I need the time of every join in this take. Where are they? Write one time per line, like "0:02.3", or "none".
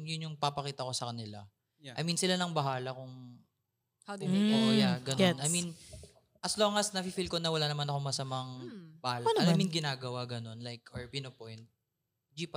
none